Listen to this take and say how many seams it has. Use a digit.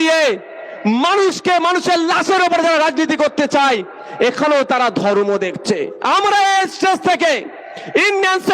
1